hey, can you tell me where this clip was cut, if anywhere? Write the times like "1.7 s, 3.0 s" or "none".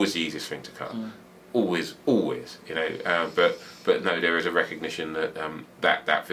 none